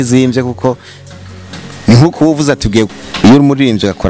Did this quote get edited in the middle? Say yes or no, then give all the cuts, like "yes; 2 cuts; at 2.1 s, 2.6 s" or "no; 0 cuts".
yes; 1 cut; at 2.9 s